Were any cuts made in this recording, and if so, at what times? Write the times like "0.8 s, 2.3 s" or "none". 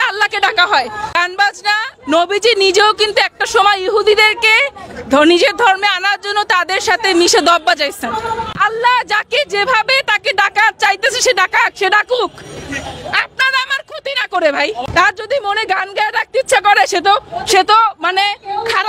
1.1 s, 8.5 s, 14.8 s